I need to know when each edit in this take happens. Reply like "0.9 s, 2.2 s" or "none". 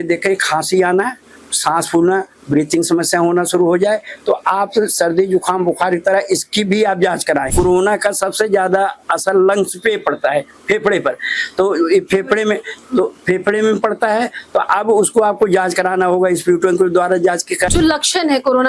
7.5 s, 17.7 s